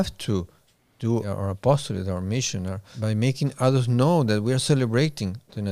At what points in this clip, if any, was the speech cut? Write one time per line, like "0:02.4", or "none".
0:01.3
0:02.9